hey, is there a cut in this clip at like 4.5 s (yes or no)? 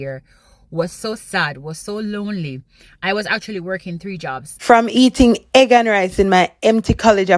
yes